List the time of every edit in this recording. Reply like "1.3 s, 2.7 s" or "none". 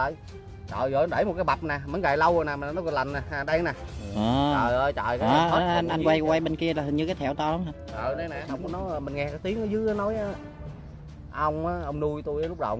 8.3 s